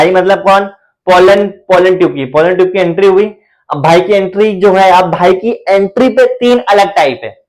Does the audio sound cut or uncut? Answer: uncut